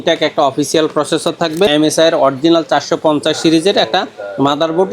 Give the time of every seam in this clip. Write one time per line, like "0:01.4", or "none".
0:01.7